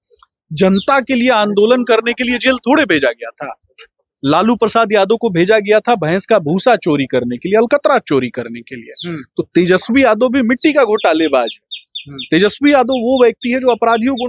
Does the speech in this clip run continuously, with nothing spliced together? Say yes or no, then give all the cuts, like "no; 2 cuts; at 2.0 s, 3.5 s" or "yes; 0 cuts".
yes; 0 cuts